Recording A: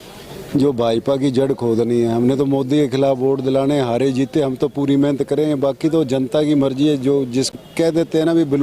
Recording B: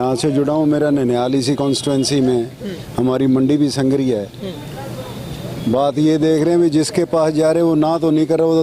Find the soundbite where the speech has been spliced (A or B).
A